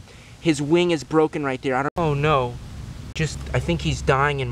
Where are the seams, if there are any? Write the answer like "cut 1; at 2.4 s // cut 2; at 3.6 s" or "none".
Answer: cut 1; at 1.9 s // cut 2; at 3.4 s